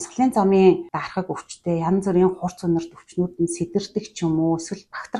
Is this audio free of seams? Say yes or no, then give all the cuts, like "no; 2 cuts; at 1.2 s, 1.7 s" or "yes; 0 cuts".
yes; 0 cuts